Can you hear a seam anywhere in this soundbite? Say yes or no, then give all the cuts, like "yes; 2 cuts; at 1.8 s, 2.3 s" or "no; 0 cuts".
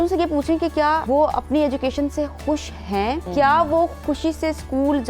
yes; 2 cuts; at 1.0 s, 3.2 s